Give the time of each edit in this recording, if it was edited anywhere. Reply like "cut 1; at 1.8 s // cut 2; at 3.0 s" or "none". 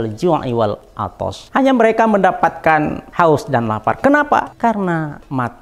cut 1; at 0.9 s // cut 2; at 3.0 s // cut 3; at 4.5 s